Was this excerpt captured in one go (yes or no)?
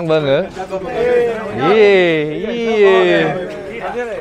no